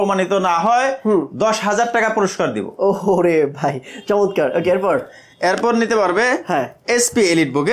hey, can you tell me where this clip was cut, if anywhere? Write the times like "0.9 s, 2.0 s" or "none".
none